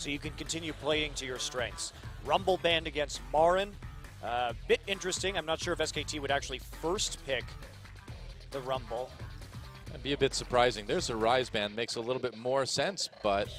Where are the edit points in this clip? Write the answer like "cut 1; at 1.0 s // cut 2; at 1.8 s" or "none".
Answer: none